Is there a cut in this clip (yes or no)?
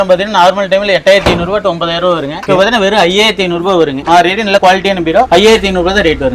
no